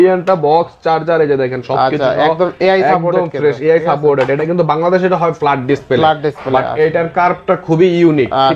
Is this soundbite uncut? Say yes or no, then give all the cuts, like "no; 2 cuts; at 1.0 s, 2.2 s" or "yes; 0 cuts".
yes; 0 cuts